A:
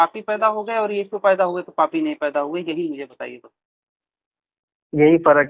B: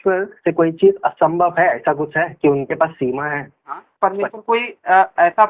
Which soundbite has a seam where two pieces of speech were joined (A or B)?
B